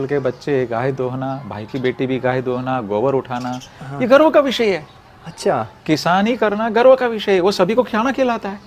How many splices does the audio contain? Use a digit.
0